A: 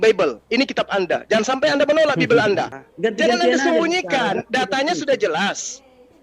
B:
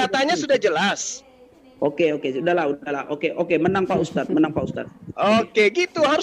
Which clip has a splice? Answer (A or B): A